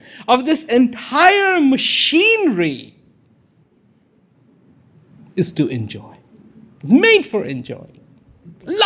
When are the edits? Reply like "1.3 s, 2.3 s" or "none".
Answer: none